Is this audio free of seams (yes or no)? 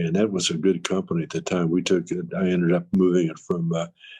yes